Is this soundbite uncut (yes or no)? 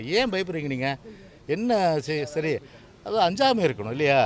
yes